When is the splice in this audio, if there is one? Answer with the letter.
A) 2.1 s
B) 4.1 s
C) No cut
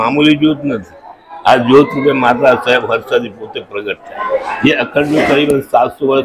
B